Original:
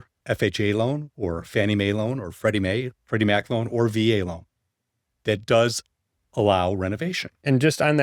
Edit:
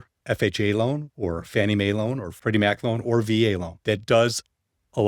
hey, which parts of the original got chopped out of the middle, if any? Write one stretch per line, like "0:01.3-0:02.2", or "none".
0:02.3-0:03.0
0:04.4-0:05.1